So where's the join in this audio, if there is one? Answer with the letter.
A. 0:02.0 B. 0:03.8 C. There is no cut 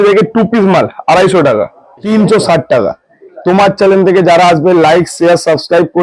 A